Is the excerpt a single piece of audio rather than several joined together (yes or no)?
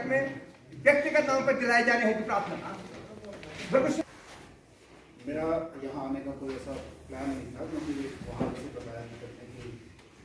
no